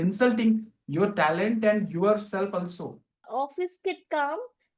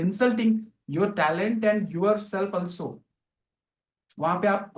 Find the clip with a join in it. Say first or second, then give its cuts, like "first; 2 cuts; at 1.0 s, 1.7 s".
first; 1 cut; at 3.3 s